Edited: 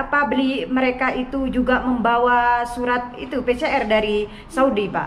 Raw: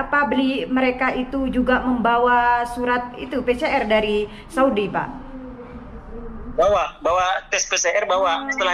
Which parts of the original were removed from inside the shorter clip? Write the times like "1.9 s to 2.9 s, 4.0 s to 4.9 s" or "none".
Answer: none